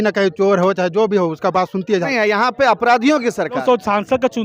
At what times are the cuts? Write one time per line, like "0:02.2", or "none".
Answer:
0:02.1
0:03.6